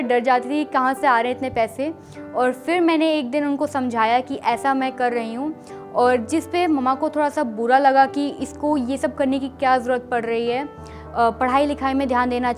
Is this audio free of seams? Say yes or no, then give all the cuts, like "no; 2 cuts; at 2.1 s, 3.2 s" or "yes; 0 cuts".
yes; 0 cuts